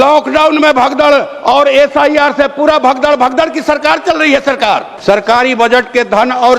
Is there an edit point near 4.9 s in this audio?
yes; 1 cut; at 4.9 s

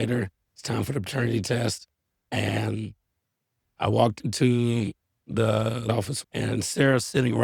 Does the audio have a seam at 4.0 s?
no; 1 cut; at 5.8 s

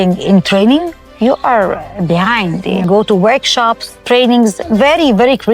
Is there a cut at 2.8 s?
yes; 1 cut; at 2.8 s

